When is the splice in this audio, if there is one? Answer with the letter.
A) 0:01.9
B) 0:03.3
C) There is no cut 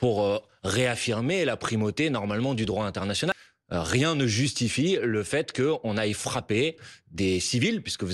B